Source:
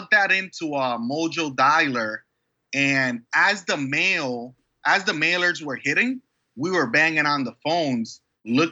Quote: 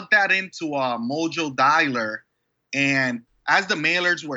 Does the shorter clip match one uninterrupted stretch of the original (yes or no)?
no